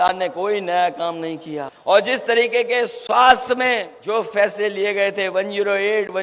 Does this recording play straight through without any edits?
no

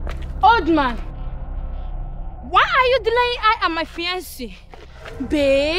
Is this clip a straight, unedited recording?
yes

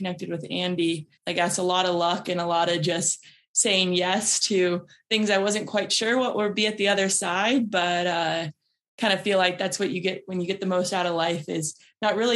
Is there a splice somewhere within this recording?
yes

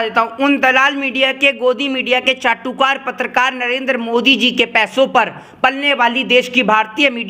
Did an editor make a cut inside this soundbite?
no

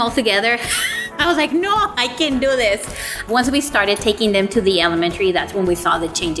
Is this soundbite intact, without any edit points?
yes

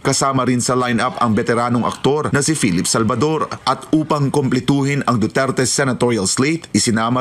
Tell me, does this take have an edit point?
yes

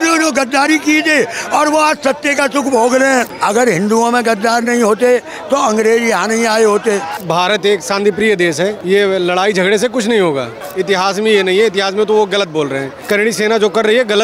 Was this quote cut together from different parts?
yes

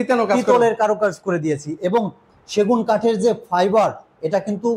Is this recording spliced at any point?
no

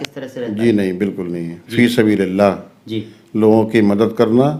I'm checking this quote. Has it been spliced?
no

